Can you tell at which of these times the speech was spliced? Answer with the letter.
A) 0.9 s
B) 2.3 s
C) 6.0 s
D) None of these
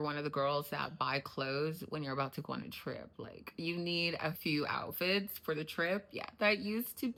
D